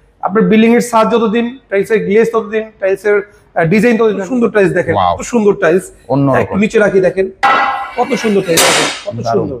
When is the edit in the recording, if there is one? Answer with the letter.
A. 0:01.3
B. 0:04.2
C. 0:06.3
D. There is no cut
B